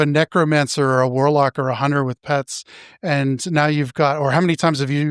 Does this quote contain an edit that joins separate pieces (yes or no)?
no